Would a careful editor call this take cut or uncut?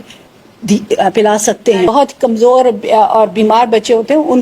cut